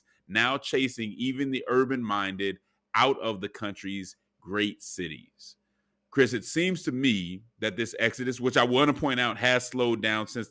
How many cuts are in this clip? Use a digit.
0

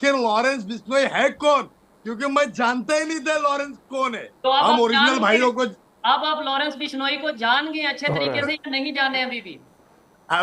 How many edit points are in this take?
1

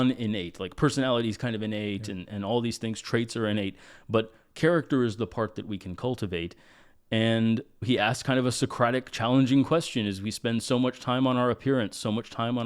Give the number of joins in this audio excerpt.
1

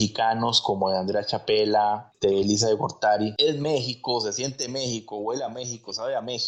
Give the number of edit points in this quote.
2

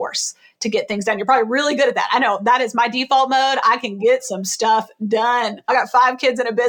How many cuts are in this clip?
1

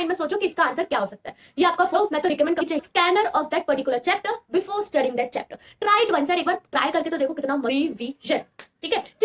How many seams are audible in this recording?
3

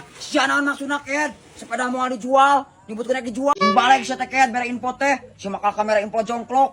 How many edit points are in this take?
1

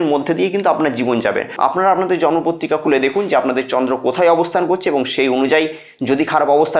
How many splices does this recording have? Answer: 1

